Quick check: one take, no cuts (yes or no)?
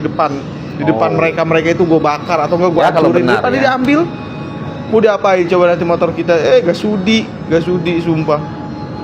yes